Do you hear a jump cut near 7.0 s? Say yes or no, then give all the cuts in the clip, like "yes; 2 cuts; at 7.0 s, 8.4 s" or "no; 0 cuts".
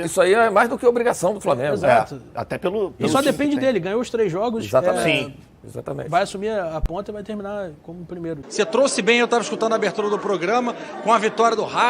no; 1 cut; at 8.4 s